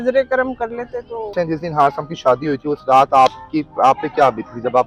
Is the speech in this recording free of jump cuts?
no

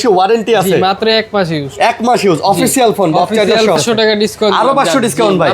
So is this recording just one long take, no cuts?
no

